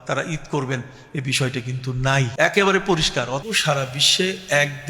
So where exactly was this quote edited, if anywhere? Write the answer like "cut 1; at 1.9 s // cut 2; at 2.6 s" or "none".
cut 1; at 2.3 s // cut 2; at 3.4 s